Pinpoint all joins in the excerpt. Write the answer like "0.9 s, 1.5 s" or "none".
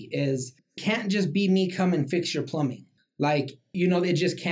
0.8 s, 3.4 s

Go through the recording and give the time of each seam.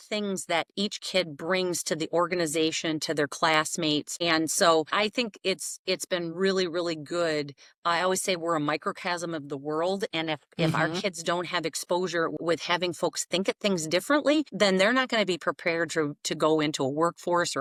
none

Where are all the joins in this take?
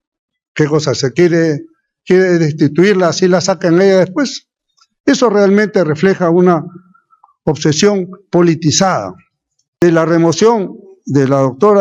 9.8 s

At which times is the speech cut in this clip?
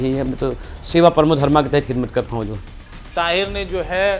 2.9 s

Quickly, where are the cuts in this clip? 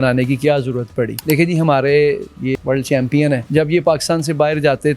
1.2 s, 2.5 s, 3.4 s

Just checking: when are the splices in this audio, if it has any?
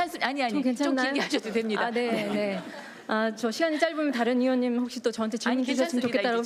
none

